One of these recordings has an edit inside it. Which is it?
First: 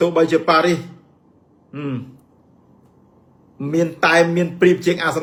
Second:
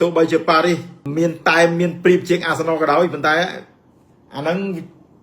second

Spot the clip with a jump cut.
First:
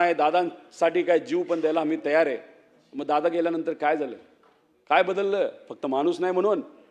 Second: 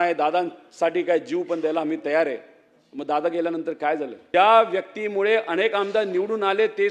second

